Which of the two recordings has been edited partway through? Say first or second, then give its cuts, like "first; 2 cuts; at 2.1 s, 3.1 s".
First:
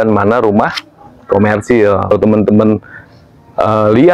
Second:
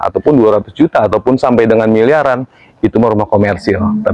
first; 1 cut; at 2.1 s